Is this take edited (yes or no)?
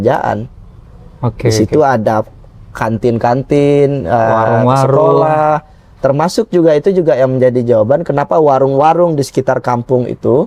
no